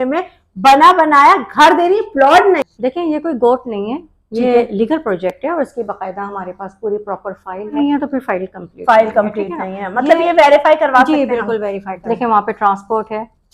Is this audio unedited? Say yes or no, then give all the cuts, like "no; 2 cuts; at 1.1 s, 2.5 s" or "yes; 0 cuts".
no; 3 cuts; at 2.7 s, 7.7 s, 11.9 s